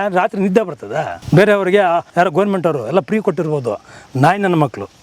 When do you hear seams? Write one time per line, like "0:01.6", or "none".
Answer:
0:01.2
0:02.1